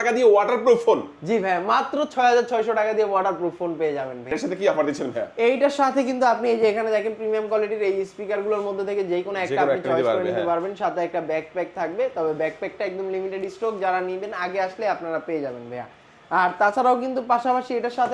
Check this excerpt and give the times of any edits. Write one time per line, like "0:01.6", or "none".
0:04.3